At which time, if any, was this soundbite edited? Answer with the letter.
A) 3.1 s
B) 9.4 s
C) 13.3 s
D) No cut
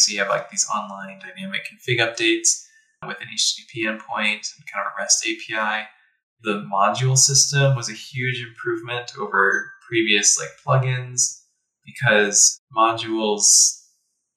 A